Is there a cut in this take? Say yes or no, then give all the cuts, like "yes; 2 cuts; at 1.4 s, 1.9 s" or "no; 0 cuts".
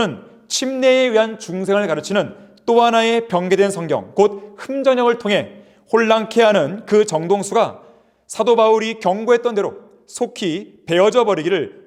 no; 0 cuts